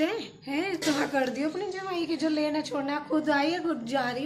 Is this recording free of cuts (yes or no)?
yes